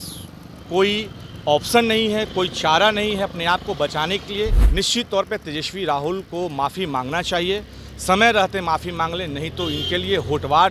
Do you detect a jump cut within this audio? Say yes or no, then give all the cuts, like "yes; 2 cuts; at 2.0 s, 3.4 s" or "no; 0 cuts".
yes; 1 cut; at 4.6 s